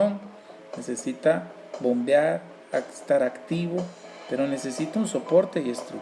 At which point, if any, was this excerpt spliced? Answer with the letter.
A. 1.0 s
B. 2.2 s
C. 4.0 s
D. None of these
A